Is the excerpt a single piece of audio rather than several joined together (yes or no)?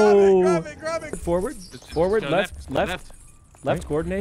no